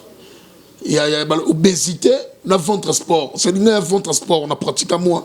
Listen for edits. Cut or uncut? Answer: uncut